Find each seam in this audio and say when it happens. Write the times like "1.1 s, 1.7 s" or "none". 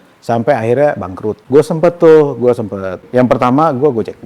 1.4 s, 3.1 s